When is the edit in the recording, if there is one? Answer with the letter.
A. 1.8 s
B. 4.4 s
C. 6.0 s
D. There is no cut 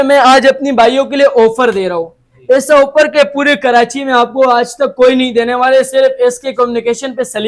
D